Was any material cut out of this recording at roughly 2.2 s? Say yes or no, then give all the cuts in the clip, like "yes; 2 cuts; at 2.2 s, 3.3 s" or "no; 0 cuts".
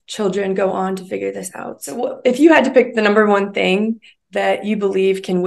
yes; 1 cut; at 2.2 s